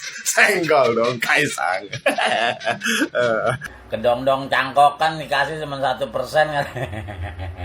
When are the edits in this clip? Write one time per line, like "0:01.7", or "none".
0:03.7